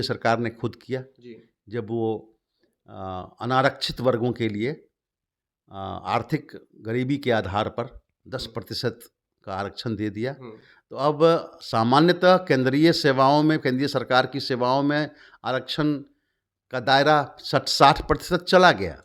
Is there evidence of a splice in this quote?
no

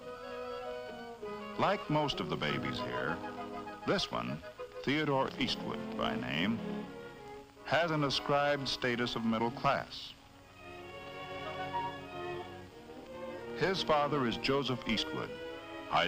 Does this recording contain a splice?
no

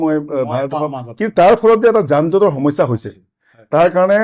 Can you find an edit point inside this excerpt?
no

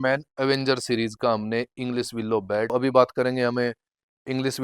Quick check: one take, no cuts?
no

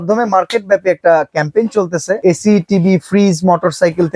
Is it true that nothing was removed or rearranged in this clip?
no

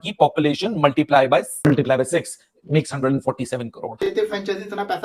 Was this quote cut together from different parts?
yes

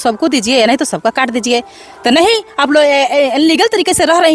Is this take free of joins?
yes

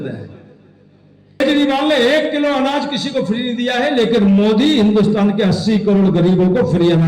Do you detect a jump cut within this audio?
yes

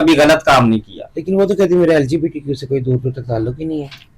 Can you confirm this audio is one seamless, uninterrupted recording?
yes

